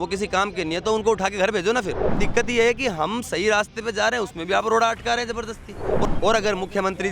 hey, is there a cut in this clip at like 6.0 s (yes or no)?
yes